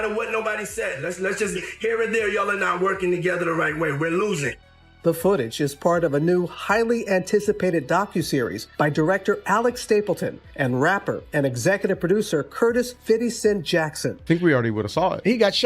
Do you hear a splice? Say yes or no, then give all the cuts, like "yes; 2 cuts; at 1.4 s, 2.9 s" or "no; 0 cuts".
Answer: yes; 1 cut; at 14.1 s